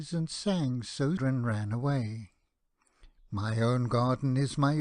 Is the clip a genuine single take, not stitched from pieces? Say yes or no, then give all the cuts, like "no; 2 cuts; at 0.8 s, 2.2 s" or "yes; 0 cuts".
yes; 0 cuts